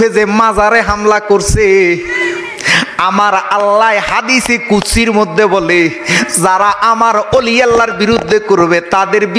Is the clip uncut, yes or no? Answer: yes